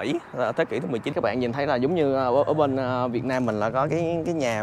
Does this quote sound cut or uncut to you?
cut